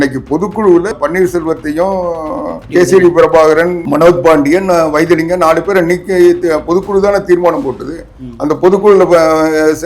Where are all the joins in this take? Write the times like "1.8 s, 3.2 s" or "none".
0.9 s, 2.6 s, 3.8 s